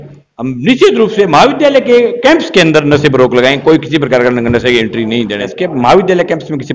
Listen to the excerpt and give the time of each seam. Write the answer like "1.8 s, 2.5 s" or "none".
5.5 s